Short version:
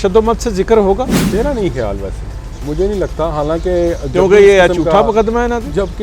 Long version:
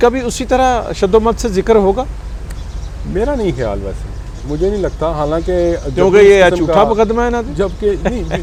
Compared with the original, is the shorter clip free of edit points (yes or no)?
no